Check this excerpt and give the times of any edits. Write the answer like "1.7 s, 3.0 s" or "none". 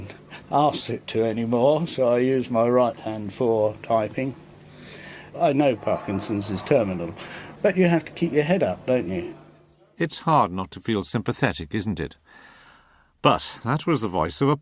8.5 s